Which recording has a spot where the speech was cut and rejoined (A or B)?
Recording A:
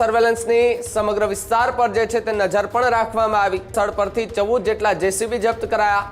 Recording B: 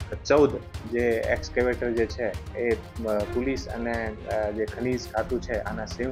A